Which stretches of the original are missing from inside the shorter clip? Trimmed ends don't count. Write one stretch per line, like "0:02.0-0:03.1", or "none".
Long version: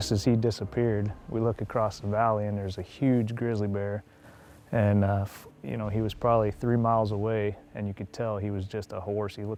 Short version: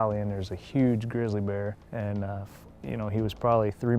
0:04.1-0:04.6